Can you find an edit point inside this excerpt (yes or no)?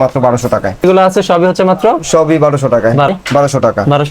yes